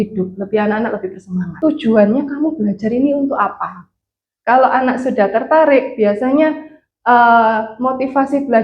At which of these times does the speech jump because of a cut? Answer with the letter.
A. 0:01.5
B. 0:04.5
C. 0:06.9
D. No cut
A